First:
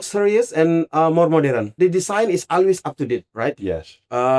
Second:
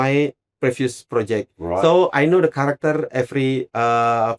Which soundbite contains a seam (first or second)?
first